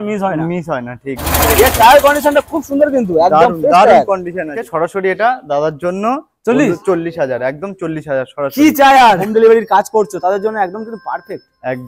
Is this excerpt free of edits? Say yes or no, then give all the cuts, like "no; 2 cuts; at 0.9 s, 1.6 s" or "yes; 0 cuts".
no; 3 cuts; at 1.2 s, 4.6 s, 9.2 s